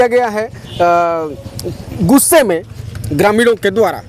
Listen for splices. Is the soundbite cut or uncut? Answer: uncut